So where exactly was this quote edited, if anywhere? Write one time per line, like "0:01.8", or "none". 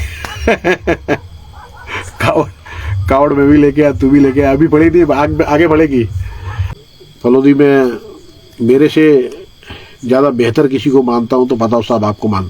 0:06.6